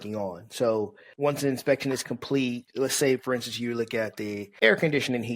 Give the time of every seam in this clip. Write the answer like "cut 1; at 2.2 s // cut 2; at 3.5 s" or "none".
cut 1; at 1.0 s // cut 2; at 2.6 s // cut 3; at 4.4 s